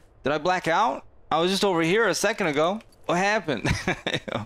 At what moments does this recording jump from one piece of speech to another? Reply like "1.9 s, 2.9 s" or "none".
2.9 s